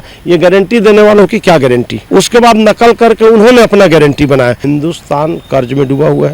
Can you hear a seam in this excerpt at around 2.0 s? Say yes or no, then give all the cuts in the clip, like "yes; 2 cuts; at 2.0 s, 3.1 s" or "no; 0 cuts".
yes; 2 cuts; at 2.0 s, 4.6 s